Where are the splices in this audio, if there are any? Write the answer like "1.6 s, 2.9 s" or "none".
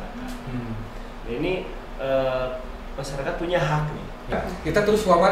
4.3 s